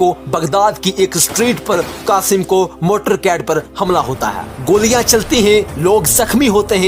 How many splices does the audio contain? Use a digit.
0